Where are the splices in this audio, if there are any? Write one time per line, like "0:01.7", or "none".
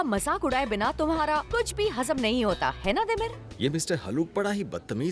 0:03.4